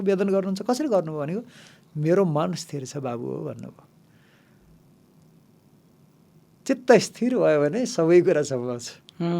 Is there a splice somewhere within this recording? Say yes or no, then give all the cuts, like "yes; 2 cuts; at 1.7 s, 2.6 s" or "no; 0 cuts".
no; 0 cuts